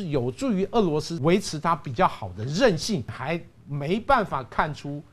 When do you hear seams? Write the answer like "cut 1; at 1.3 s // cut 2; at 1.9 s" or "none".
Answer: cut 1; at 1.1 s // cut 2; at 3.1 s

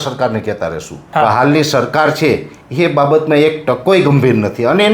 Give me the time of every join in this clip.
cut 1; at 1.0 s

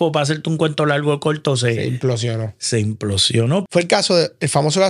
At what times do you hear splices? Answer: cut 1; at 3.7 s

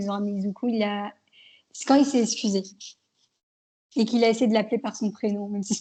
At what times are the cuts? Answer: none

